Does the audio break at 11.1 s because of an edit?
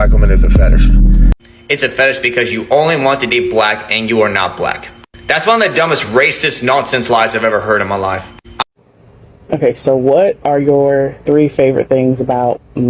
no; 2 cuts; at 1.4 s, 8.6 s

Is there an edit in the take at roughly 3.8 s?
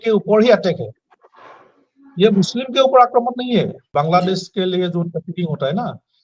yes; 1 cut; at 3.8 s

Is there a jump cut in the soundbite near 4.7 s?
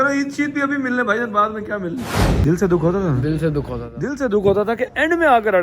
no; 1 cut; at 2.1 s

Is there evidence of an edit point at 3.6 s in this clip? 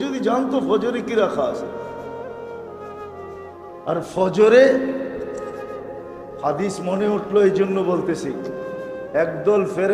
no; 0 cuts

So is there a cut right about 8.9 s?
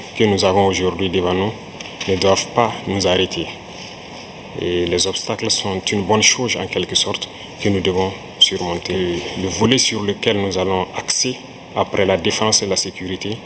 yes; 1 cut; at 8.9 s

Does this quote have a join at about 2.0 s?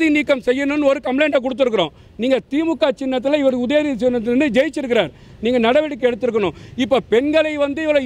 no; 0 cuts

